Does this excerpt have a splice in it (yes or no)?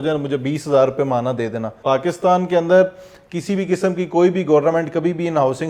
yes